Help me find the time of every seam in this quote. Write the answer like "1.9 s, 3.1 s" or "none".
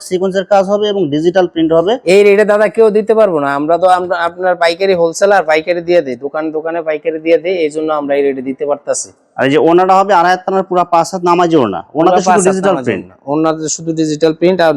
none